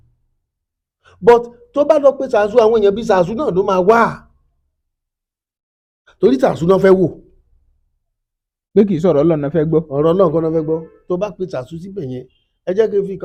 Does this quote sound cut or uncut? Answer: uncut